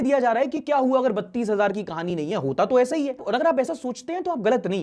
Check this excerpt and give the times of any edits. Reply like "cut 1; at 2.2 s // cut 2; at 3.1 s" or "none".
none

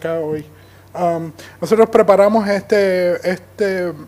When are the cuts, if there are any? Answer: cut 1; at 3.2 s

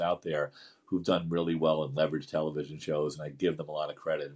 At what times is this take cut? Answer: none

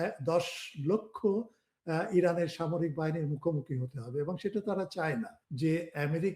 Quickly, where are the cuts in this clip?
cut 1; at 5.4 s

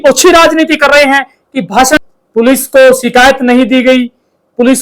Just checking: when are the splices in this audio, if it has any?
cut 1; at 2.0 s

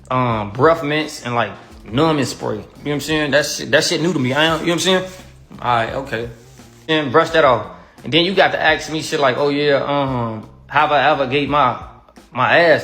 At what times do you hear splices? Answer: cut 1; at 6.8 s // cut 2; at 11.1 s

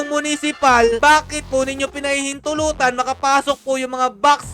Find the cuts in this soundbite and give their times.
cut 1; at 1.0 s

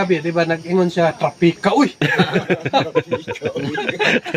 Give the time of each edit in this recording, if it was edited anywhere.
none

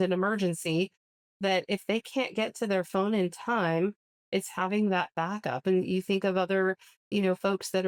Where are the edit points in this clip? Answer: none

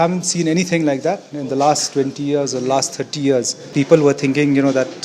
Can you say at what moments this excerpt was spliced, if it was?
cut 1; at 3.6 s

